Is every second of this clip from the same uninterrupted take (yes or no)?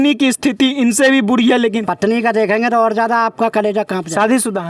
no